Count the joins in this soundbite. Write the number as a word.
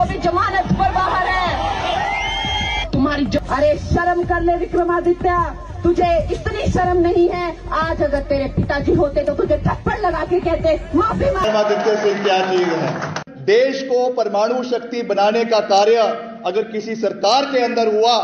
two